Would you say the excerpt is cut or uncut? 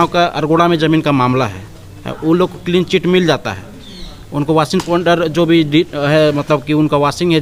uncut